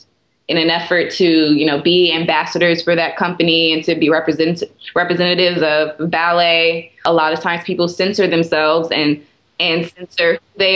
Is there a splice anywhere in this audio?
no; 0 cuts

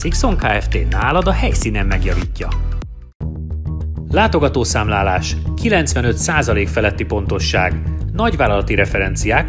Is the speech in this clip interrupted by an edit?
no; 0 cuts

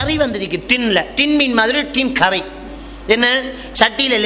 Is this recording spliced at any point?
no; 0 cuts

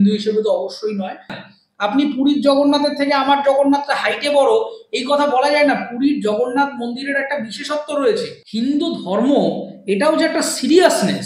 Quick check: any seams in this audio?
yes; 2 cuts; at 1.4 s, 8.4 s

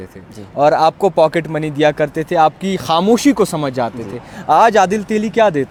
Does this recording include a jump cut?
no; 0 cuts

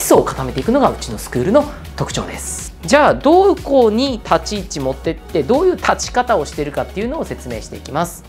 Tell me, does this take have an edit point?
yes; 1 cut; at 2.7 s

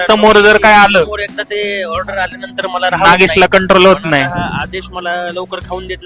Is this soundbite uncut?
yes; 0 cuts

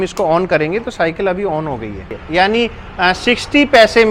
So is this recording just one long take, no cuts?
no; 1 cut; at 2.1 s

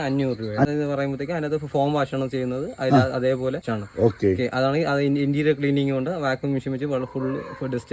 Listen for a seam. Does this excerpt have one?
yes; 2 cuts; at 0.7 s, 3.7 s

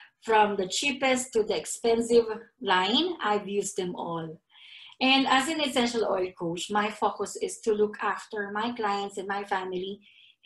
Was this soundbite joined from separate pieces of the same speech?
no; 0 cuts

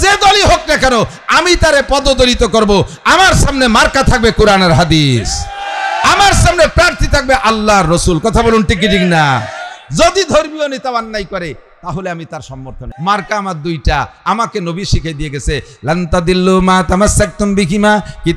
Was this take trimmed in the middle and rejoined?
yes; 1 cut; at 12.9 s

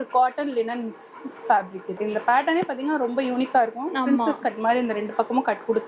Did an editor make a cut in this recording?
yes; 1 cut; at 2.0 s

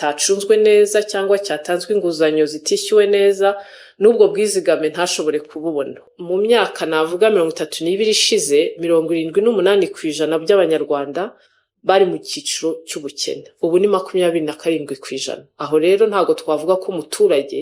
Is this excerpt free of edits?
no; 1 cut; at 6.1 s

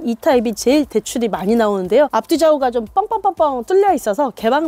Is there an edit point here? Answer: yes; 1 cut; at 2.1 s

